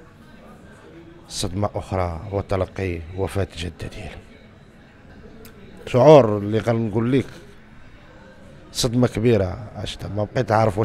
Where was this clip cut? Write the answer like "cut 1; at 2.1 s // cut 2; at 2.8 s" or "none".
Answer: cut 1; at 5.1 s